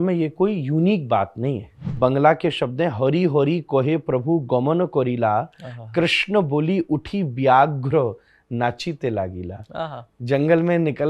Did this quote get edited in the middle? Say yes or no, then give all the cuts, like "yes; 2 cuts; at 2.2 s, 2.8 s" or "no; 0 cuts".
yes; 1 cut; at 1.9 s